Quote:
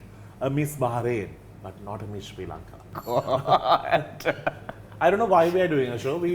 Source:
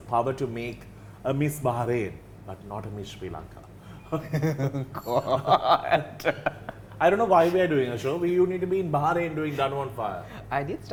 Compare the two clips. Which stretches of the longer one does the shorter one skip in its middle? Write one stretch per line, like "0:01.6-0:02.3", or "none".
0:03.8-0:04.9